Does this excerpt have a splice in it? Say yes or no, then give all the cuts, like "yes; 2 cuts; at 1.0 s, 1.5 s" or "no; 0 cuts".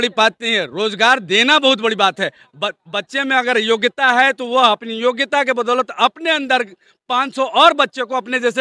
no; 0 cuts